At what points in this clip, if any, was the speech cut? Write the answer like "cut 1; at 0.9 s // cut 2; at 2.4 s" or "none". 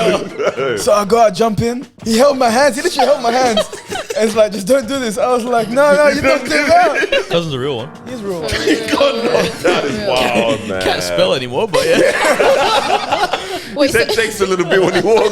cut 1; at 1.9 s // cut 2; at 7.3 s